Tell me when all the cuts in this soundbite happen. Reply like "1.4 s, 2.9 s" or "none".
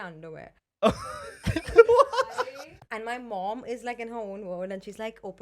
2.3 s